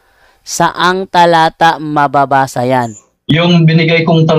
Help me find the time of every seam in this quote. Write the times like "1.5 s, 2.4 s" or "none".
3.0 s